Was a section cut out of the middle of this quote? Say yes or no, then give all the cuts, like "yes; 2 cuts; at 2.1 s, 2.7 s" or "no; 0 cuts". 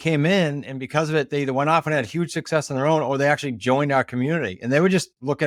no; 0 cuts